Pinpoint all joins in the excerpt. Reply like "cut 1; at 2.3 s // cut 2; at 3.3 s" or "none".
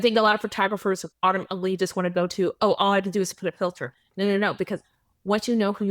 cut 1; at 1.1 s